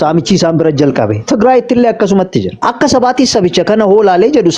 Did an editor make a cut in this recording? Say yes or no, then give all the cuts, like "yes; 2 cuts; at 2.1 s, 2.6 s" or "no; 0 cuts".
yes; 1 cut; at 2.6 s